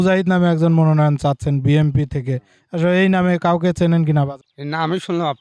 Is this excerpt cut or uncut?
cut